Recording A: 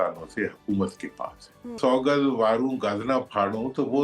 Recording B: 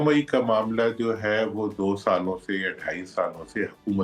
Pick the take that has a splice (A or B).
A